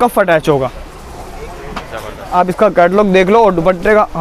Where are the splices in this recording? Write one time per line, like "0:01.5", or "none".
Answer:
0:02.3